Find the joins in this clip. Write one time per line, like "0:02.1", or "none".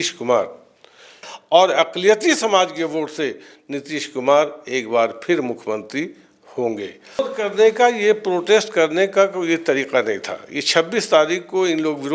0:01.3
0:07.2